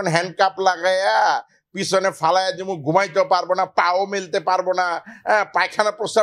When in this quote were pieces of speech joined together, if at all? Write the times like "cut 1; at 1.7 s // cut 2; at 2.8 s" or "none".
none